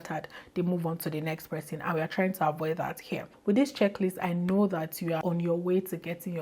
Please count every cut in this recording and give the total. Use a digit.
2